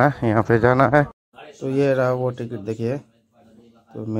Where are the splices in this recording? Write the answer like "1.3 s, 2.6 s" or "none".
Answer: 1.2 s

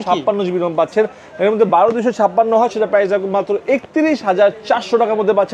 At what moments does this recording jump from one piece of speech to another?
none

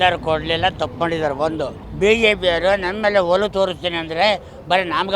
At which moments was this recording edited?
1.8 s

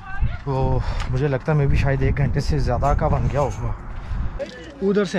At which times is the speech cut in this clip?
4.3 s

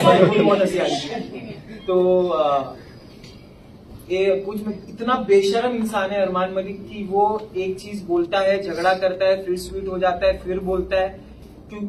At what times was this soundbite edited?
none

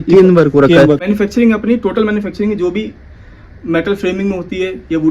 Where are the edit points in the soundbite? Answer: 1.0 s

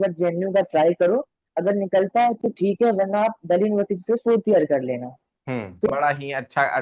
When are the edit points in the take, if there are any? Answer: 5.9 s

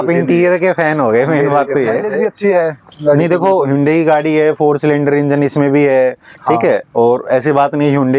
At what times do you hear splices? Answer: none

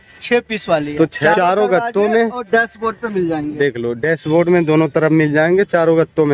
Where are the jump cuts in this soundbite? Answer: 1.2 s

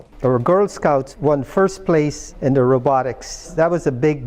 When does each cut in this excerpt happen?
1.1 s, 3.5 s

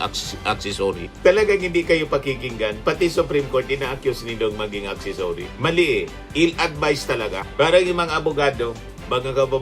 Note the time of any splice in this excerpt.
none

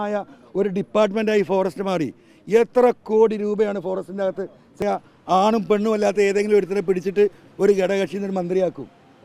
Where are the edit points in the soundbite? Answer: 4.8 s

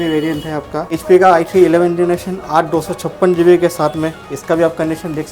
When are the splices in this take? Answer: 0.9 s

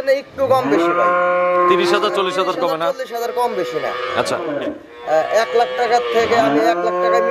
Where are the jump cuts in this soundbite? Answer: 4.4 s

